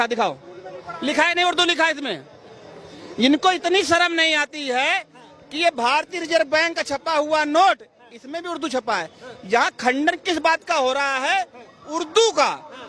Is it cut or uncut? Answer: uncut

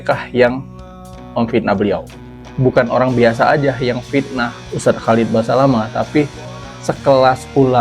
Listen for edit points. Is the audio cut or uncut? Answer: cut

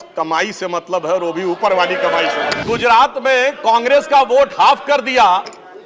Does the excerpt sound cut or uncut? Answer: cut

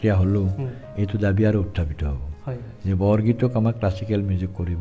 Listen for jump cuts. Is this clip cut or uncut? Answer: uncut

